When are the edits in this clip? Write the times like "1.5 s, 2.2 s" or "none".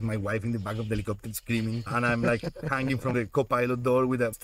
1.9 s